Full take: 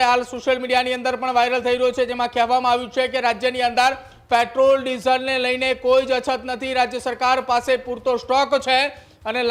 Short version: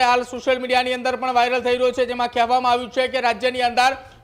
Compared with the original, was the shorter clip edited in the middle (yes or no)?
no